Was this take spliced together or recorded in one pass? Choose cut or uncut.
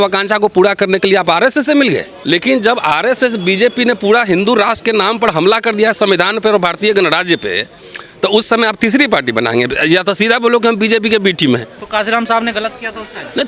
cut